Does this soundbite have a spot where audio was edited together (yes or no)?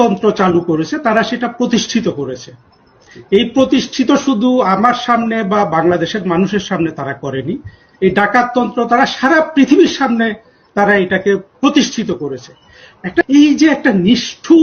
yes